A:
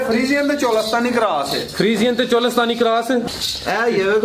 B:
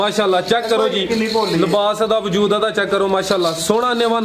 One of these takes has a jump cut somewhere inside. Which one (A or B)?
A